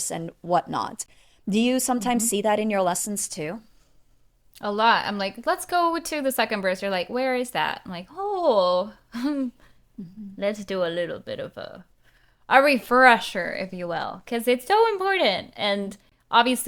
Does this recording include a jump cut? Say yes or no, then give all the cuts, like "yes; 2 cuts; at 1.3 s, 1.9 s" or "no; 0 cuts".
no; 0 cuts